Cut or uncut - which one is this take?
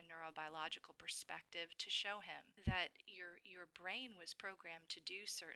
cut